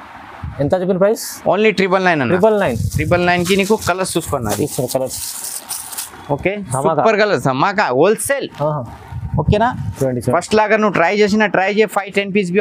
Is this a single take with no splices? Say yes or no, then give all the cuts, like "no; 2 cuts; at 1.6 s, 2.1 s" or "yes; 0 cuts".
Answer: yes; 0 cuts